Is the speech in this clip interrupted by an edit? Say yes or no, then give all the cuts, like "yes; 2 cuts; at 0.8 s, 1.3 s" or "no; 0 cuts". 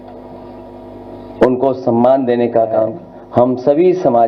yes; 1 cut; at 2.9 s